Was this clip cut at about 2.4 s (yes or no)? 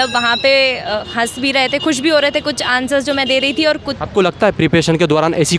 no